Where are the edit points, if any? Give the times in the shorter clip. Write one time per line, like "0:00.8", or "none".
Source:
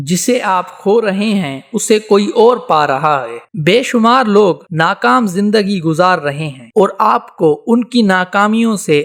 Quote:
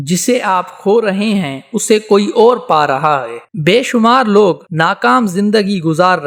none